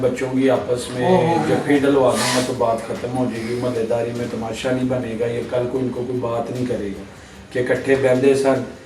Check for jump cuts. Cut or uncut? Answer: uncut